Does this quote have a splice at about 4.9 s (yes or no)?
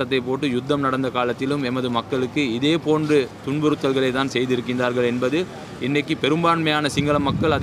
no